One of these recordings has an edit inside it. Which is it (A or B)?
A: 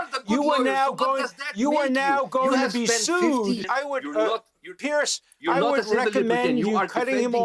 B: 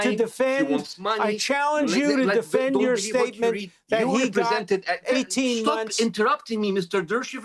A